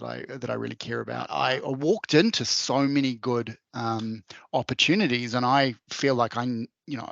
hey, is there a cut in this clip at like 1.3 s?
yes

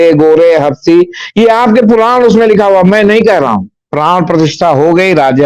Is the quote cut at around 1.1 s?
no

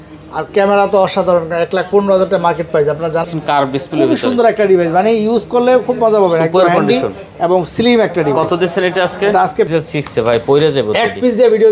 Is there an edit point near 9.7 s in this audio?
yes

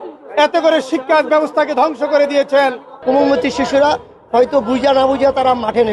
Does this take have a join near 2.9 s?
yes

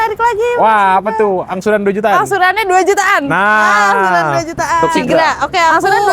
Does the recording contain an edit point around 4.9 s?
yes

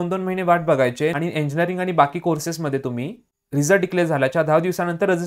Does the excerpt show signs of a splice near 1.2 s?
yes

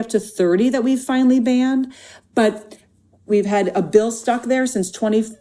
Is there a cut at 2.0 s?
no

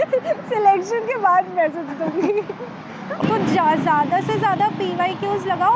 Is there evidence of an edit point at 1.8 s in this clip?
no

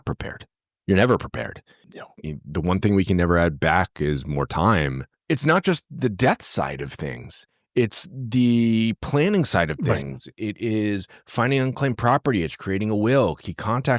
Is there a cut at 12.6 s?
no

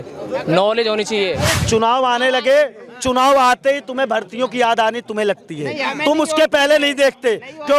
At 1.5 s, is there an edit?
yes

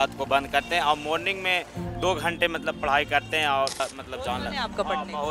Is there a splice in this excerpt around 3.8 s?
yes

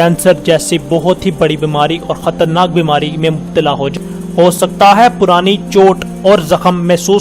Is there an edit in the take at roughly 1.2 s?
no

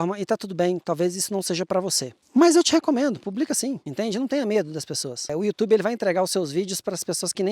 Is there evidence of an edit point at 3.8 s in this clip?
yes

